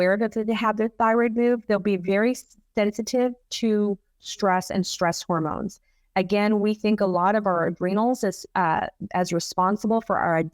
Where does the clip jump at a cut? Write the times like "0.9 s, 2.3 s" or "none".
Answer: none